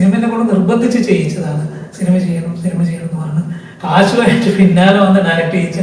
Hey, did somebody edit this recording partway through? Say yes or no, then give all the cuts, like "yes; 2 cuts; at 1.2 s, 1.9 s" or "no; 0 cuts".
no; 0 cuts